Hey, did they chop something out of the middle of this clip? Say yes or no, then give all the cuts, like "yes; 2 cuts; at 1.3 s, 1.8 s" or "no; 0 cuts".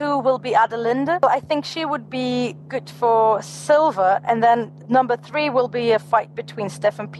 yes; 2 cuts; at 1.2 s, 4.7 s